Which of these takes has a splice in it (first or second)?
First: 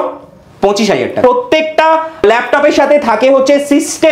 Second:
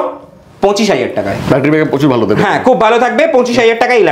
first